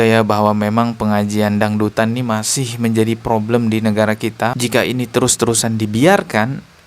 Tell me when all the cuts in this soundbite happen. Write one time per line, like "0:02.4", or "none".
0:04.6